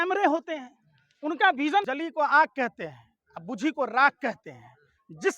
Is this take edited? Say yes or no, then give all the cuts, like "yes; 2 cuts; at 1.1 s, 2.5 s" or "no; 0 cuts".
yes; 1 cut; at 1.9 s